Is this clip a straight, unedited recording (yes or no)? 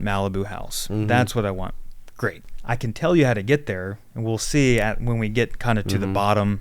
no